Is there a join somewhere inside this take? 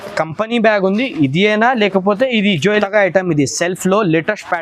yes; 1 cut; at 2.8 s

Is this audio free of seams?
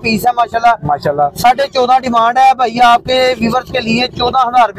yes; 0 cuts

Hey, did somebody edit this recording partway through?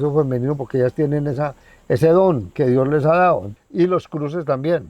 yes; 1 cut; at 3.5 s

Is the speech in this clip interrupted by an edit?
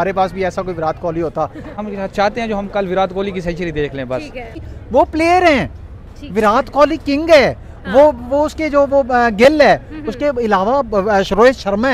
yes; 2 cuts; at 1.7 s, 4.7 s

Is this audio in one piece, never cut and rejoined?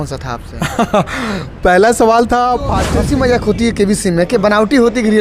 no; 1 cut; at 2.8 s

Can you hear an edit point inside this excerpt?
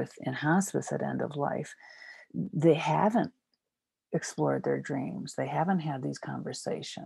no; 0 cuts

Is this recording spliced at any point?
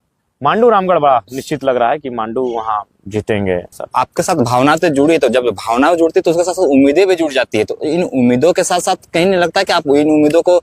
no; 0 cuts

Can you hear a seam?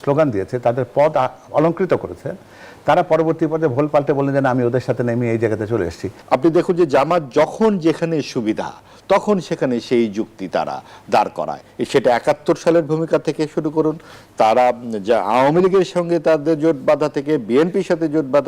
yes; 1 cut; at 6.1 s

